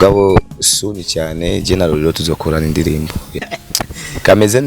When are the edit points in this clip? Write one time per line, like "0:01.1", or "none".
0:03.4